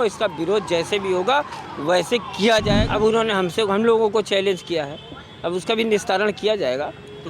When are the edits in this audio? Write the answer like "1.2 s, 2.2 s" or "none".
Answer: 2.8 s